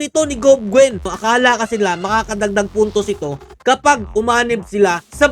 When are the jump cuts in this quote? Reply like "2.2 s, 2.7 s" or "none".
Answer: 1.1 s